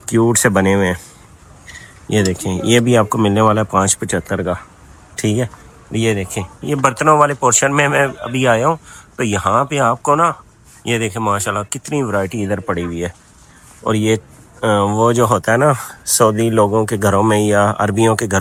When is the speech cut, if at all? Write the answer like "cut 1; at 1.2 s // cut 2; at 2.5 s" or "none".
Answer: none